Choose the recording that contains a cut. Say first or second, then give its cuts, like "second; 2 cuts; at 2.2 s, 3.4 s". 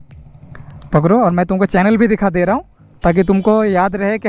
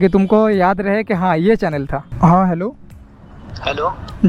second; 1 cut; at 2.1 s